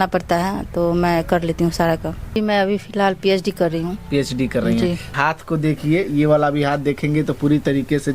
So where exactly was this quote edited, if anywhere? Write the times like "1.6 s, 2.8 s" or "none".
2.3 s, 5.1 s